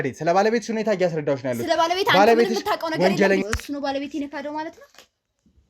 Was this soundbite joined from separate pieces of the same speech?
yes; 1 cut; at 3.4 s

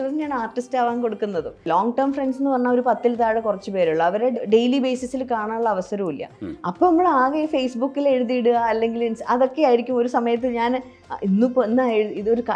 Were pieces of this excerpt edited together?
yes; 2 cuts; at 1.7 s, 4.4 s

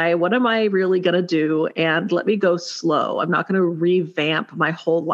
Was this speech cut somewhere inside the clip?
no; 0 cuts

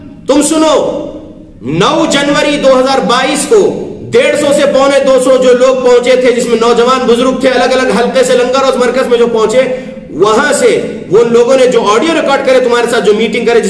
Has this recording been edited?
no; 0 cuts

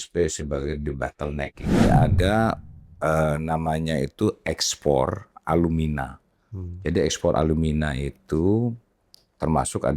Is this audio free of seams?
no; 1 cut; at 1.8 s

